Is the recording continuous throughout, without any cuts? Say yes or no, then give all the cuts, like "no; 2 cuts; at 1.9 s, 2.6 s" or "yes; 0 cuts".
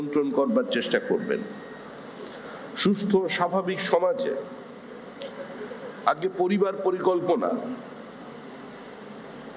yes; 0 cuts